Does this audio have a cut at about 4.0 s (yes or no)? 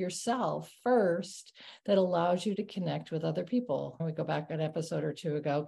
yes